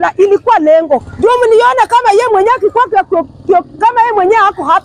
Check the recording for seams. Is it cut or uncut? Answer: cut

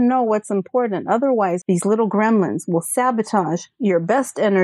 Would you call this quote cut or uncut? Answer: cut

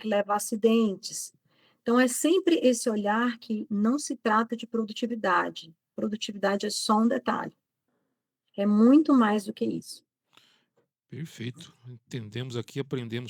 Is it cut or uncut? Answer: uncut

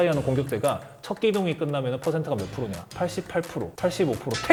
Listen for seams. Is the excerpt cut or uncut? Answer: uncut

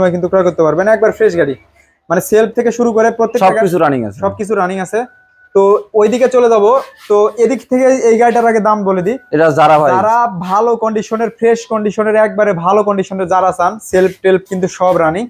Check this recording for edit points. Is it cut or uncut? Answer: uncut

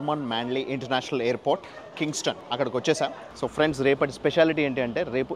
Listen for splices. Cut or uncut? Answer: cut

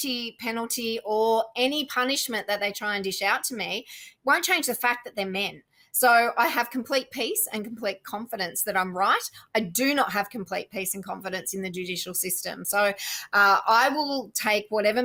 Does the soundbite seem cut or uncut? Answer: uncut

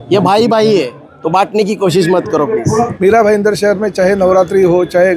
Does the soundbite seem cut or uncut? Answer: cut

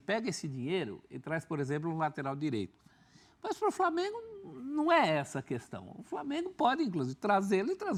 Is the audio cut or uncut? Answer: uncut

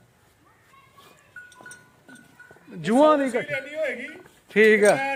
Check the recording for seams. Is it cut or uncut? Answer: uncut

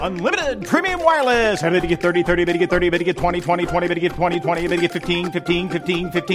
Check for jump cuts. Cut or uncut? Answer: uncut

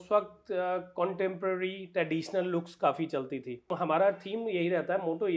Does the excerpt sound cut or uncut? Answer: cut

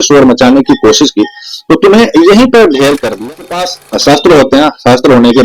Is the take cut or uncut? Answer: cut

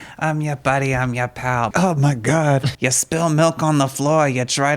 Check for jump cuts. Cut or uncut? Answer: cut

